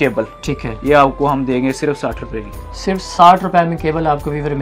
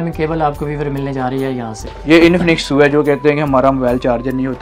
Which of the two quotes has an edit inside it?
second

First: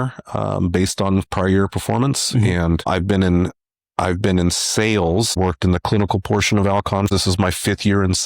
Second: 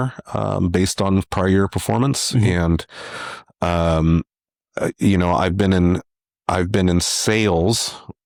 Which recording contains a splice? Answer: first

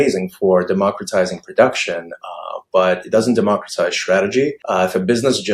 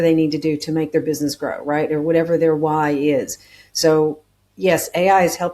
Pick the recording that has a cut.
first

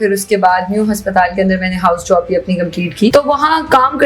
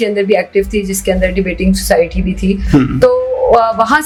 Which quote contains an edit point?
first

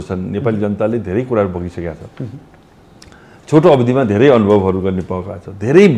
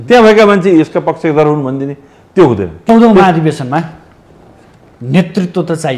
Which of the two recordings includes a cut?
second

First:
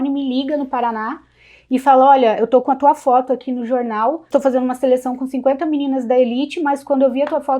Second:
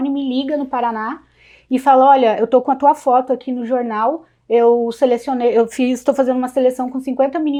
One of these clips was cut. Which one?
first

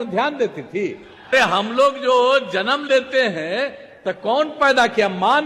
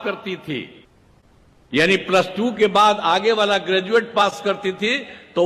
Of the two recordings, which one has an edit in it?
first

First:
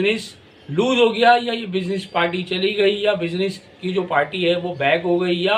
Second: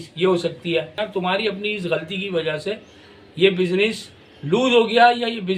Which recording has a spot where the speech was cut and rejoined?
second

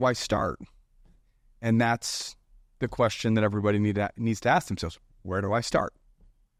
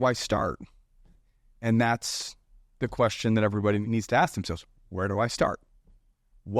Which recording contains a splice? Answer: second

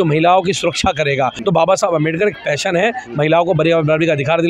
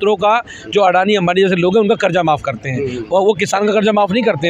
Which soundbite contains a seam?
first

